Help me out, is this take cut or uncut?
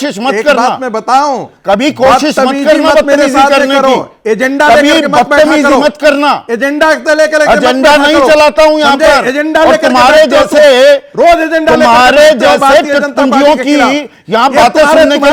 uncut